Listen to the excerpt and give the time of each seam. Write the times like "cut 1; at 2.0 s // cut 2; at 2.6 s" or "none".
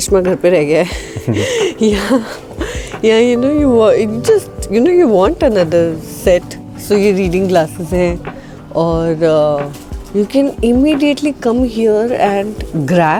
none